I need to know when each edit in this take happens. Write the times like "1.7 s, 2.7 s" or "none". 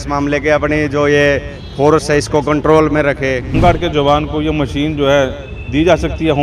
3.6 s